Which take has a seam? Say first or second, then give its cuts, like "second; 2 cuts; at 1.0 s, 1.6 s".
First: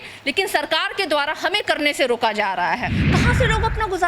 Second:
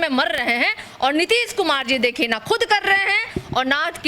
first; 1 cut; at 3.0 s